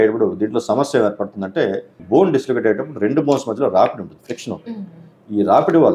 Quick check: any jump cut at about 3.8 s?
no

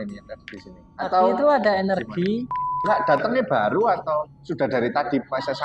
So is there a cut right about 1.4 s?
no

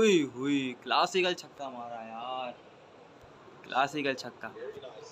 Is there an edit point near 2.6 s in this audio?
no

